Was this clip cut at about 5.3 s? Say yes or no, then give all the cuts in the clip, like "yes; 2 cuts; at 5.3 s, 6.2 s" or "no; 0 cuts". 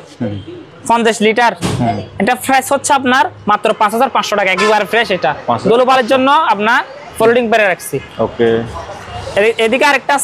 no; 0 cuts